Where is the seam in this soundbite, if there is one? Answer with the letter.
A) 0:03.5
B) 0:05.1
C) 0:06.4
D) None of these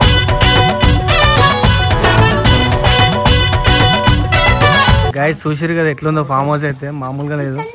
B